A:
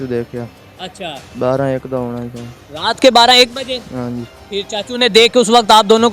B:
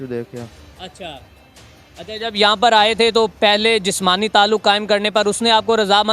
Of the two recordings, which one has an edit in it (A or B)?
A